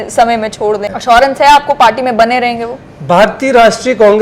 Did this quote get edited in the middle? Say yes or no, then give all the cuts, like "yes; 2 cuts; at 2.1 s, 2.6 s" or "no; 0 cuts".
yes; 1 cut; at 0.9 s